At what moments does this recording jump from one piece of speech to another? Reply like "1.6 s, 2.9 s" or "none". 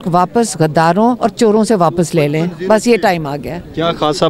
1.2 s